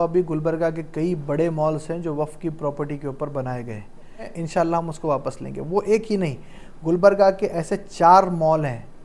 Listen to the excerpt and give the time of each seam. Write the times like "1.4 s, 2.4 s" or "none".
4.4 s